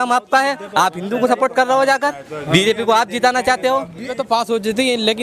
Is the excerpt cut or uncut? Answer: cut